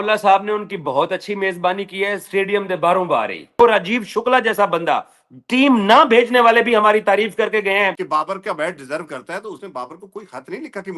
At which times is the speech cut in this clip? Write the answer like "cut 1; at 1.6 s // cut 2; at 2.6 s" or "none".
cut 1; at 3.6 s // cut 2; at 8.0 s